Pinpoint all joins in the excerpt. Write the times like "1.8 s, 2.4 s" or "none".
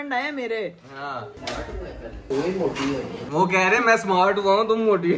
2.2 s, 3.2 s